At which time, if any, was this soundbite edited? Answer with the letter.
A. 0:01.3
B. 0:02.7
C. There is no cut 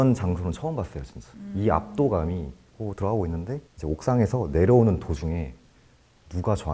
B